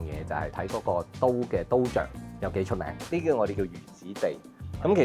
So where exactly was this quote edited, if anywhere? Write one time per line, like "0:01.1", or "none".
0:02.7